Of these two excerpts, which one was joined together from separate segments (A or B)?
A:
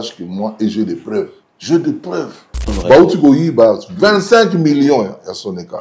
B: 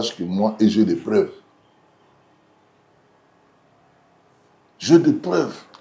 A